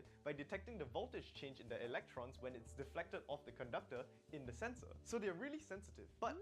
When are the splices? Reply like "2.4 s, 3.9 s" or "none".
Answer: 5.5 s